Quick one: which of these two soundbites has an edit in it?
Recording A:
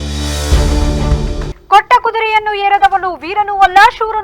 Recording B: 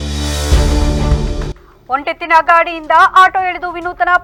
A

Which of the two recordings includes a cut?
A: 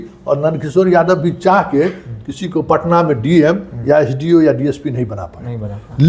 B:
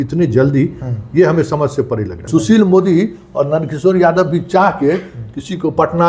B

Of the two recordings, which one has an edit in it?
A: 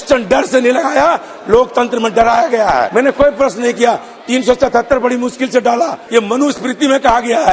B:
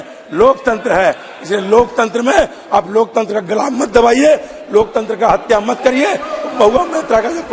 A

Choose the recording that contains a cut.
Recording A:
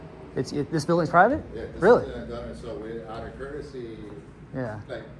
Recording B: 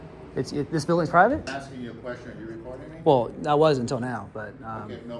B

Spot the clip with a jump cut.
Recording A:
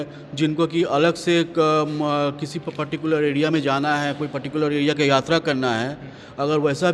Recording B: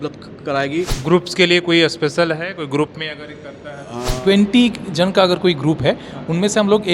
B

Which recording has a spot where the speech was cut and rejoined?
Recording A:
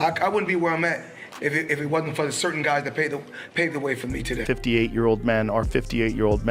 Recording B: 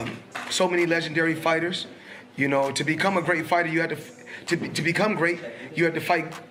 A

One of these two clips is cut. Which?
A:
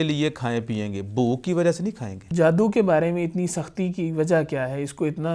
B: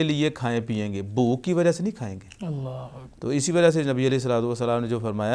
A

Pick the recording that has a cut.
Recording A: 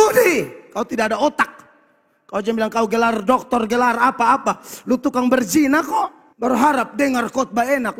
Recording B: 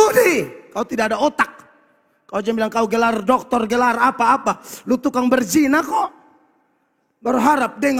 A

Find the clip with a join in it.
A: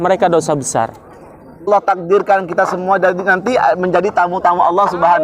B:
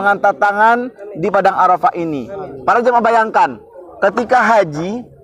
A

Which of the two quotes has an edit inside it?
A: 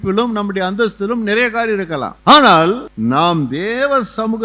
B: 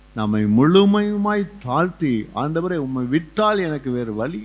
A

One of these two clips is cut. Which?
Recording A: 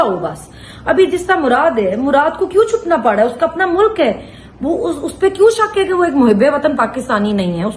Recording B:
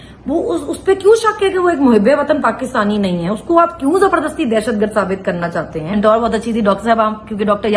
B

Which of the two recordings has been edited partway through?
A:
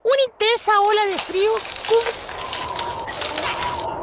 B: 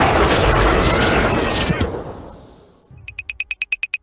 B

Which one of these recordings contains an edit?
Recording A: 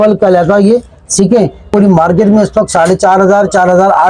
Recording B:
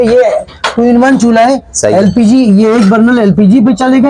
A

